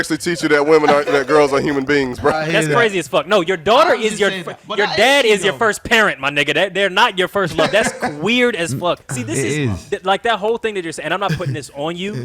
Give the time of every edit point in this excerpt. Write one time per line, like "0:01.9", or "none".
0:02.4
0:09.1

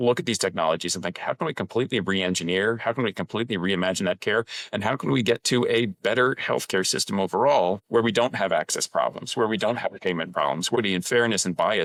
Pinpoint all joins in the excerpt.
none

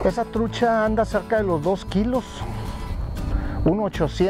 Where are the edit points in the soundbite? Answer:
none

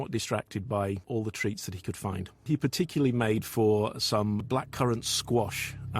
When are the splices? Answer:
0:01.0
0:04.5

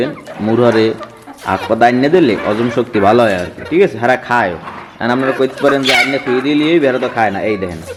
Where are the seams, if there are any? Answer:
none

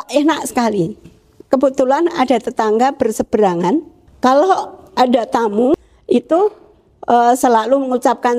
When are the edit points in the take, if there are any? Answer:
0:04.0
0:05.7

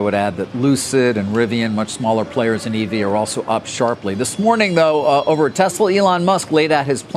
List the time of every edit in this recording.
none

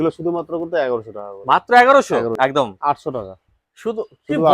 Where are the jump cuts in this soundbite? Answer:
0:02.4

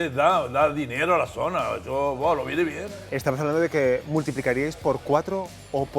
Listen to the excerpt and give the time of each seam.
0:02.9

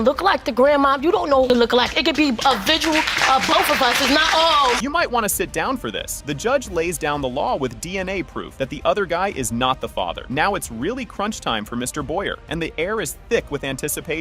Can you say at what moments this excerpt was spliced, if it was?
none

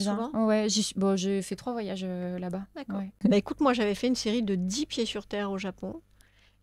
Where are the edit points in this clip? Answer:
0:03.2

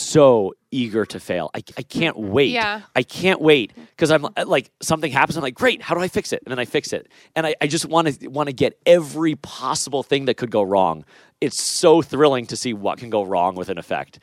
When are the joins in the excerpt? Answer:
none

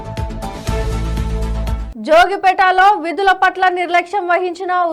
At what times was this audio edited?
0:01.8

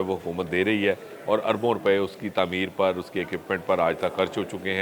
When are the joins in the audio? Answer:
none

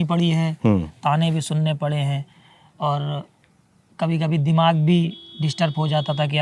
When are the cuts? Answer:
none

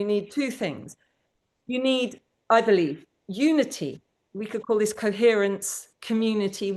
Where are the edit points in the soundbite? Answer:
none

